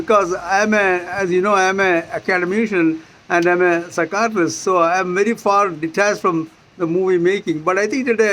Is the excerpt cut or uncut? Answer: uncut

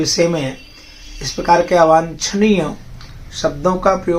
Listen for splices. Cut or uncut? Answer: uncut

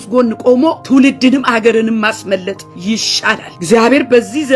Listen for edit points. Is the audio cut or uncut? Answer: cut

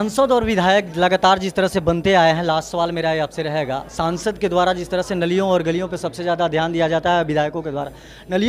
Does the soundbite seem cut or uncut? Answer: uncut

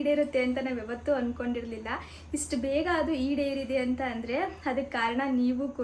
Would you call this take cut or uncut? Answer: uncut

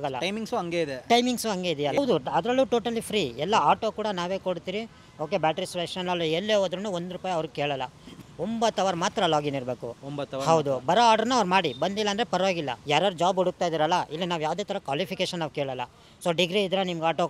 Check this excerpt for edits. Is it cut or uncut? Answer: cut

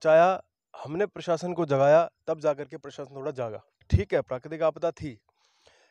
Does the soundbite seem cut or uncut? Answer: cut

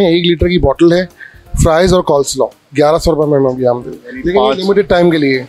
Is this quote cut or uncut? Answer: uncut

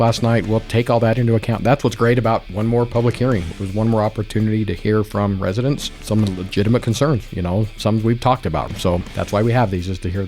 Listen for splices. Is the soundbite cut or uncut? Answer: cut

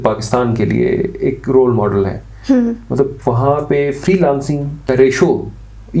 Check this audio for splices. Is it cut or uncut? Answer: cut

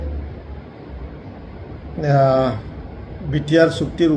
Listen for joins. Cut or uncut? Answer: uncut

